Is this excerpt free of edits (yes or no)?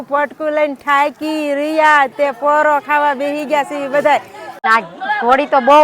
no